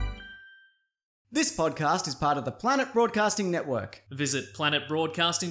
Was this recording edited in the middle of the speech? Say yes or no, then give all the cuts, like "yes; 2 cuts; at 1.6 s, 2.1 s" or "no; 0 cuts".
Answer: yes; 1 cut; at 1.1 s